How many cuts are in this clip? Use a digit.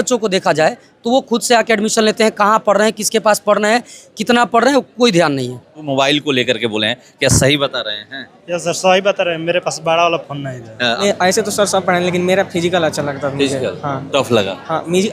2